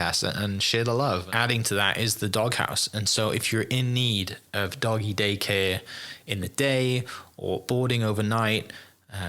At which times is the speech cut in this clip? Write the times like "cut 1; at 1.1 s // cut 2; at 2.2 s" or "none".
cut 1; at 1.3 s